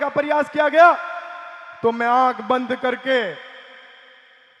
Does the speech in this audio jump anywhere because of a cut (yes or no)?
no